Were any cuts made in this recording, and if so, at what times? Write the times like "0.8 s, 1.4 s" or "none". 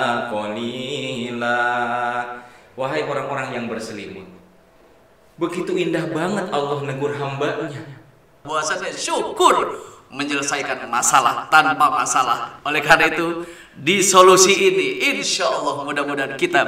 8.4 s